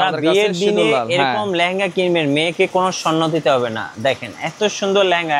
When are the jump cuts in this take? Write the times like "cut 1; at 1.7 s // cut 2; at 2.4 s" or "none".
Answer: none